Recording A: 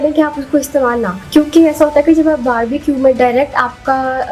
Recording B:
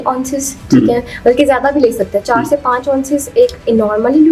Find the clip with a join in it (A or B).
A